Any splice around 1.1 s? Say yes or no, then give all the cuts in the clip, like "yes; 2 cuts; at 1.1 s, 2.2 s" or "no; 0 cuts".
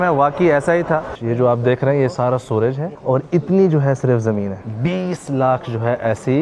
yes; 3 cuts; at 1.1 s, 2.9 s, 4.6 s